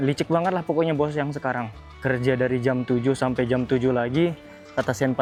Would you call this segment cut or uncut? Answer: uncut